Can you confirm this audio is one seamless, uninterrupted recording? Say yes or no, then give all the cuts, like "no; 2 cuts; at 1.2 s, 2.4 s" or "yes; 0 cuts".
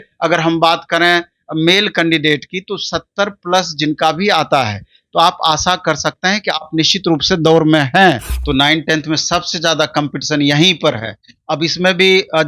no; 1 cut; at 8.3 s